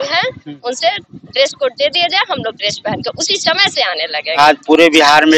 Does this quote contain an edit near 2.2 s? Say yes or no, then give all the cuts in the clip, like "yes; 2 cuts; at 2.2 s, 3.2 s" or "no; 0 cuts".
no; 1 cut; at 4.4 s